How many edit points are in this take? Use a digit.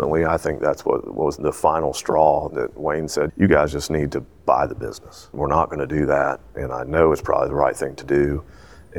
0